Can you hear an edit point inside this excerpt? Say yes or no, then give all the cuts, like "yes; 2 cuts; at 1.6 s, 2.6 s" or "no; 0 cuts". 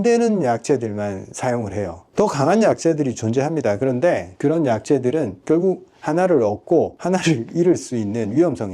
yes; 2 cuts; at 2.0 s, 7.0 s